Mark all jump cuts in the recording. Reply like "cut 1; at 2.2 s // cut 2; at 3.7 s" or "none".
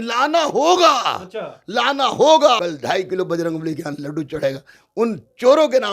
cut 1; at 2.7 s